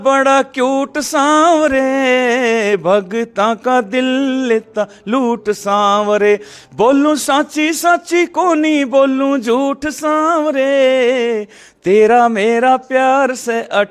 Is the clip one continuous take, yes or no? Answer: yes